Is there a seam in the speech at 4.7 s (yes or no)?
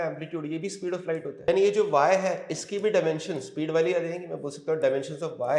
no